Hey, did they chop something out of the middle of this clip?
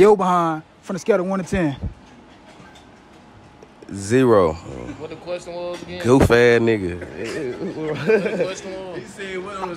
no; 0 cuts

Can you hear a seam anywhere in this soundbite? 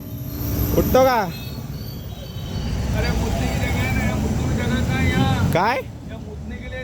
no; 0 cuts

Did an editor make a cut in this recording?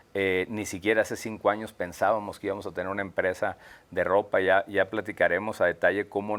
no; 0 cuts

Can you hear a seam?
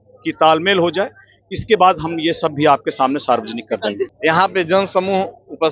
yes; 1 cut; at 4.1 s

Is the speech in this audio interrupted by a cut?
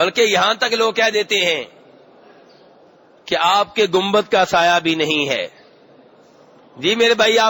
no; 0 cuts

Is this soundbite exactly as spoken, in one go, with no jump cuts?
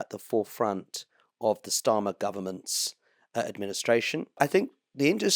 no; 1 cut; at 4.4 s

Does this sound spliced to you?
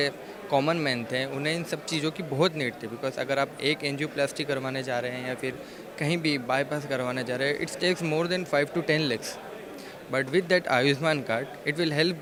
no; 0 cuts

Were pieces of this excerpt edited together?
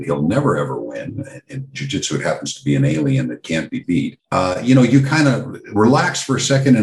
yes; 1 cut; at 4.2 s

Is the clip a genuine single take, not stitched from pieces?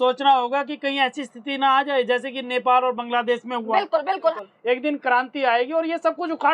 no; 1 cut; at 4.3 s

